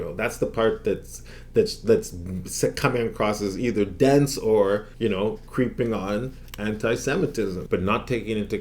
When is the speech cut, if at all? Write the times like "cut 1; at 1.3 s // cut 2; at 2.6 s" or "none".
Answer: cut 1; at 7.6 s